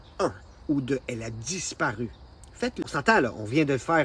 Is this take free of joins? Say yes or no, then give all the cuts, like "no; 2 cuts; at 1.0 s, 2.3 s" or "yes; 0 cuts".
no; 1 cut; at 2.8 s